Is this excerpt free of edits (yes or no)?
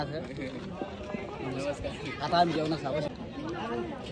no